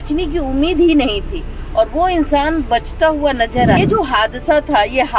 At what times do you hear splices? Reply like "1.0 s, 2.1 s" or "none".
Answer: 3.8 s